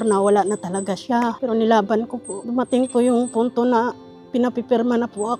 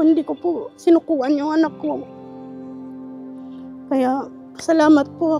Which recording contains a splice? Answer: first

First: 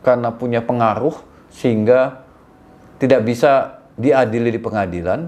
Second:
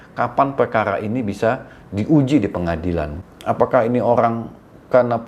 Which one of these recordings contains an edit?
second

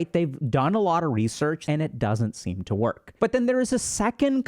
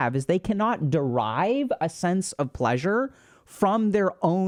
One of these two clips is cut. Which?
first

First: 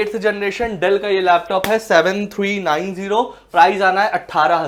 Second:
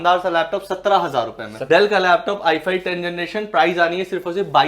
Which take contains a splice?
second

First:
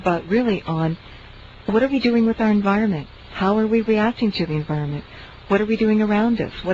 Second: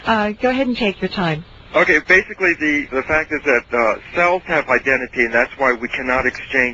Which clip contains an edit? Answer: first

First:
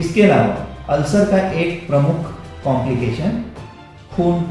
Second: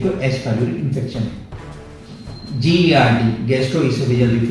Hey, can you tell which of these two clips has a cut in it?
second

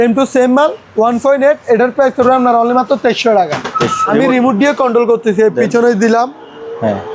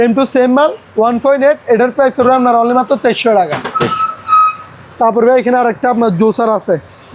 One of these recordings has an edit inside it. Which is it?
first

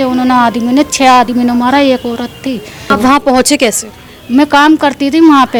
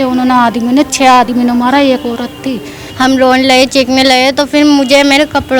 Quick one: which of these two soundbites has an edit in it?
second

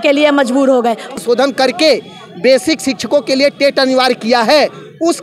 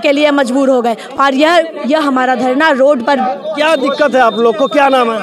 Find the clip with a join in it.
first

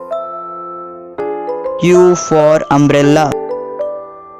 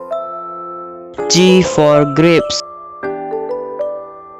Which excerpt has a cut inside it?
first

